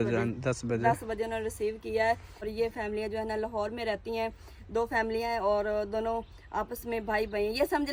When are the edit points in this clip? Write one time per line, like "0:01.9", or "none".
none